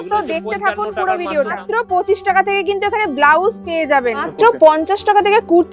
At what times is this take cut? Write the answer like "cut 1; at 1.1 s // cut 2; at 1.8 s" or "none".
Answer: cut 1; at 1.6 s // cut 2; at 4.3 s